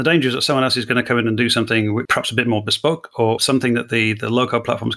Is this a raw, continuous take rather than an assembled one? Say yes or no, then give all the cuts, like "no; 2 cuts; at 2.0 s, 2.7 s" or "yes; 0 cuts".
no; 2 cuts; at 2.1 s, 3.4 s